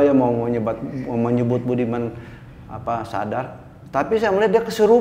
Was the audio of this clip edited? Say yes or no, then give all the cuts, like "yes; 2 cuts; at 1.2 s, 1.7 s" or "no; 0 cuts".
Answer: no; 0 cuts